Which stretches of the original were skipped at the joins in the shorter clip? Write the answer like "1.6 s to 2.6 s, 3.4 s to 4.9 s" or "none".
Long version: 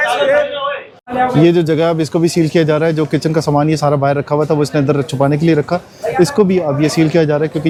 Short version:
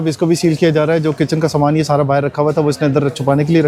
none